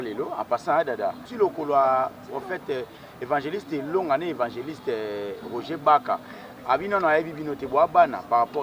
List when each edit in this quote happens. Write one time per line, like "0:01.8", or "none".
0:01.3